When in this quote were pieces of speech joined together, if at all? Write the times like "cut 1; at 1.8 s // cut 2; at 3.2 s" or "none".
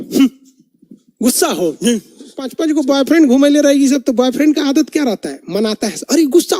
cut 1; at 2.6 s